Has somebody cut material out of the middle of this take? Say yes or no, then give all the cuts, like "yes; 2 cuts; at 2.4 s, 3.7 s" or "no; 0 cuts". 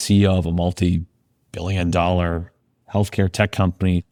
no; 0 cuts